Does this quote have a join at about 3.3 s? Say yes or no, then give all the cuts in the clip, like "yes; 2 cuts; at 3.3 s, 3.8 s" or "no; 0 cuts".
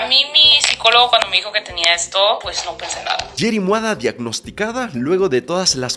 no; 0 cuts